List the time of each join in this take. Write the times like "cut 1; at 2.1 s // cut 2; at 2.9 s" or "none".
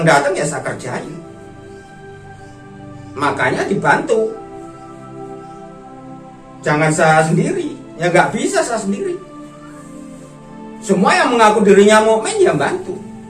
cut 1; at 5.0 s // cut 2; at 6.6 s // cut 3; at 9.4 s // cut 4; at 10.9 s